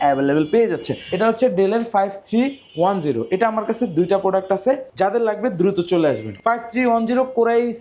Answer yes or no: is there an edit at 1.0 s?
yes